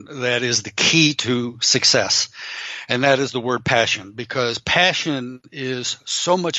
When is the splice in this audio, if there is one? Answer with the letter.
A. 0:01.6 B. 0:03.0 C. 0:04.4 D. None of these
D